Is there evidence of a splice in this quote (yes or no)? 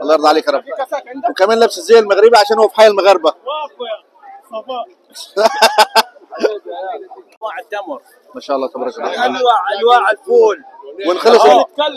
yes